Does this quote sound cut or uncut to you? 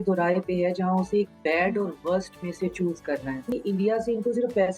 cut